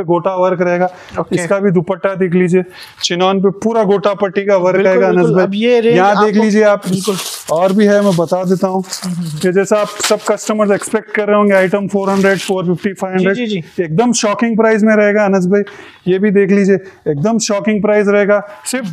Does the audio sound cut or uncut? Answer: uncut